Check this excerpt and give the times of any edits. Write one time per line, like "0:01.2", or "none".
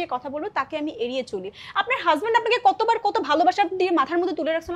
none